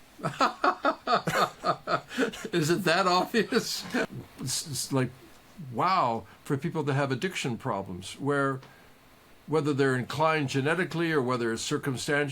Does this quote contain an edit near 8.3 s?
no; 1 cut; at 4.1 s

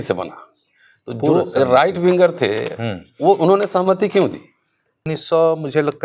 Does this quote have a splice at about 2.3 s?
no; 1 cut; at 5.1 s

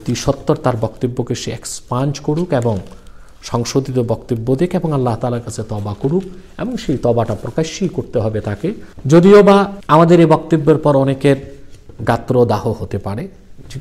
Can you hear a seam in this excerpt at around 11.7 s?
no; 2 cuts; at 8.9 s, 9.8 s

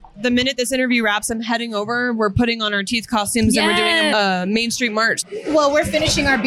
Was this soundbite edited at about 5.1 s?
yes; 2 cuts; at 4.1 s, 5.1 s

